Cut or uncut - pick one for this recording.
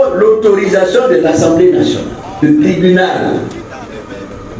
cut